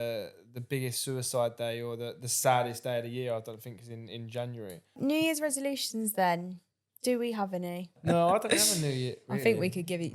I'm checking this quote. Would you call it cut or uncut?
cut